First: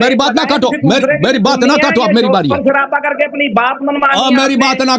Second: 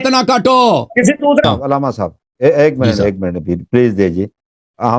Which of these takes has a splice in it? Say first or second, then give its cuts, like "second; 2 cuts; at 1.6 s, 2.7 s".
second; 1 cut; at 1.4 s